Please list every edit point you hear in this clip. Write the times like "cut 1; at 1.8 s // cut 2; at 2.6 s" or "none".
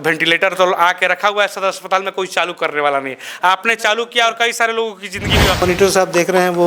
cut 1; at 5.6 s